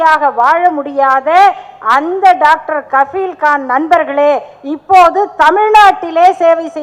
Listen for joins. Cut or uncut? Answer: uncut